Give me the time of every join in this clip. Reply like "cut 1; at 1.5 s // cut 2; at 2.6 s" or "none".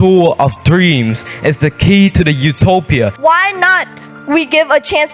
cut 1; at 3.1 s